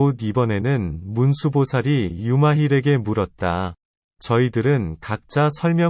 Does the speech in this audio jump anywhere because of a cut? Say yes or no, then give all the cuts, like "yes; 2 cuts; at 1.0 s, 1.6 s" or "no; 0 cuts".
no; 0 cuts